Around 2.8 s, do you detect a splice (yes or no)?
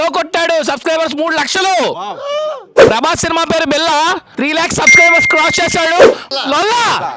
no